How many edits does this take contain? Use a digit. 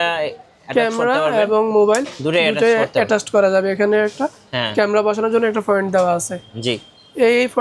0